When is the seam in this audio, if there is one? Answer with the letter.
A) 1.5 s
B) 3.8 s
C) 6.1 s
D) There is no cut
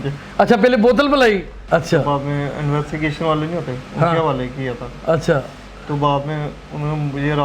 A